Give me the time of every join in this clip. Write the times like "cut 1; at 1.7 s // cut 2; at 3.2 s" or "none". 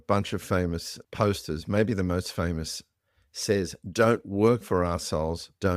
cut 1; at 1.0 s